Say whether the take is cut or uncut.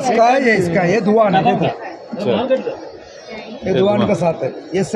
uncut